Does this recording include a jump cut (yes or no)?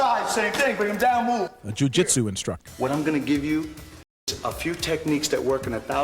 yes